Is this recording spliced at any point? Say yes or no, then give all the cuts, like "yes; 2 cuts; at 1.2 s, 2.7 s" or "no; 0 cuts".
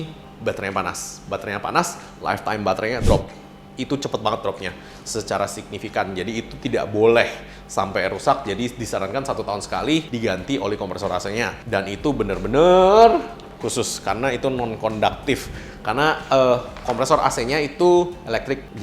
no; 0 cuts